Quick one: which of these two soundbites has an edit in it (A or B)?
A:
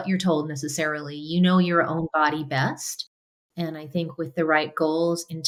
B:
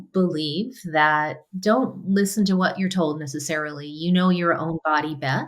B